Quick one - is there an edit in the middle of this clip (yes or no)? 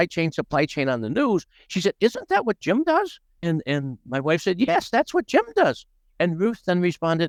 no